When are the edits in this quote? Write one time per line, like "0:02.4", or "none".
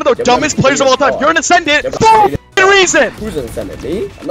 0:01.9
0:03.2